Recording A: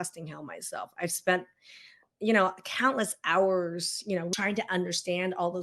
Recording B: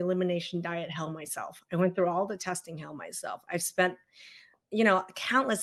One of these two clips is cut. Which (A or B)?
A